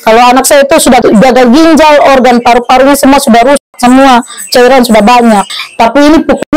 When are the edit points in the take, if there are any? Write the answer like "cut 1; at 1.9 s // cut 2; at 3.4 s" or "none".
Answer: cut 1; at 5.6 s